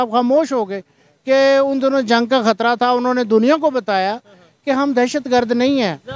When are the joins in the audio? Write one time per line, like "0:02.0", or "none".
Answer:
none